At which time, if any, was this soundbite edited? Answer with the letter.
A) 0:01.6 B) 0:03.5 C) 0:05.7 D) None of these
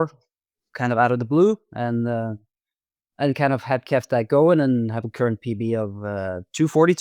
D